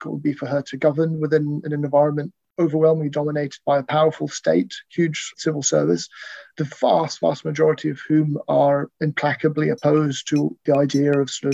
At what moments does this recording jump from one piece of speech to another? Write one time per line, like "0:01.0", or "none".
0:05.3
0:06.4
0:10.6